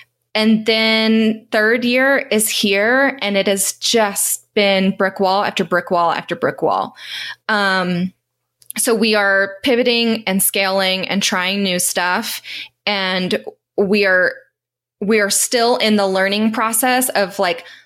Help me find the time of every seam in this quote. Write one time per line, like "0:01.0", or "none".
none